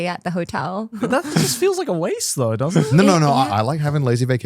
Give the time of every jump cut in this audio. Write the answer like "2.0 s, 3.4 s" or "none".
0.9 s, 3.5 s